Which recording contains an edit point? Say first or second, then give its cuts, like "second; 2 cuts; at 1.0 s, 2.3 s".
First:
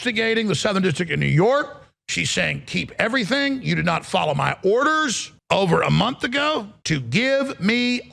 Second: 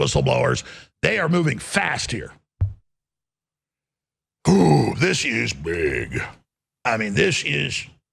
first; 2 cuts; at 5.3 s, 6.7 s